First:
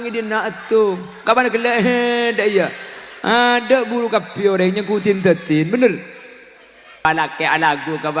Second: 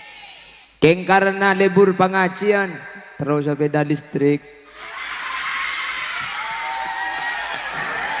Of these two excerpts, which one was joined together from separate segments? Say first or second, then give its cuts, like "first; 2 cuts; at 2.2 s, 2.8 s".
first; 1 cut; at 7.1 s